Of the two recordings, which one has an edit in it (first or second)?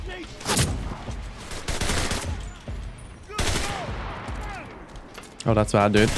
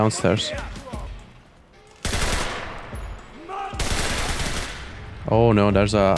second